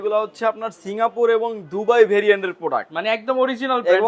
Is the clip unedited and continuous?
yes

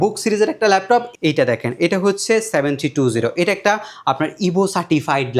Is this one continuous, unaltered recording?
no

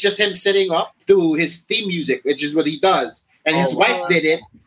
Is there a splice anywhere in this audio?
yes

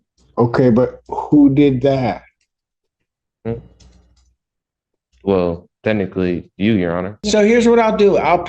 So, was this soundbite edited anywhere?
yes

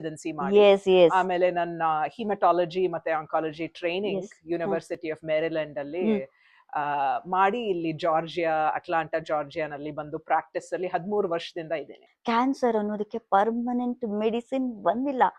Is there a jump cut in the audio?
yes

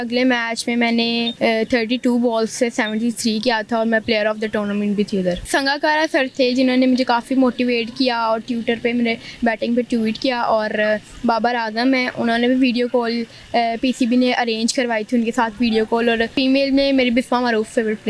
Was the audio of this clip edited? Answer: yes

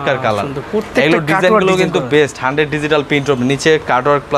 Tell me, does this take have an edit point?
no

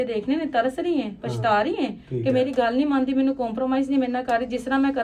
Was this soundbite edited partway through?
no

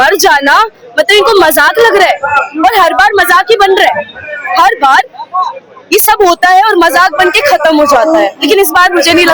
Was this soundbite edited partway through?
no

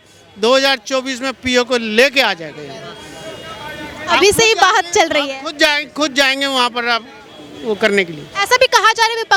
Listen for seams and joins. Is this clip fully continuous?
yes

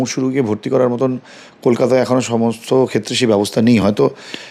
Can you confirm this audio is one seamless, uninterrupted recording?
yes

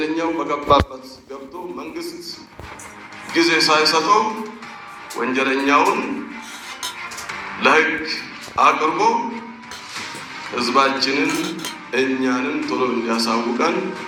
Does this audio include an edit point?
no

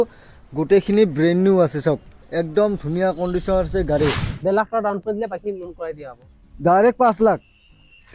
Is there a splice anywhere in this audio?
yes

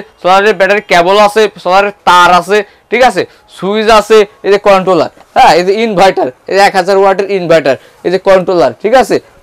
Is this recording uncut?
yes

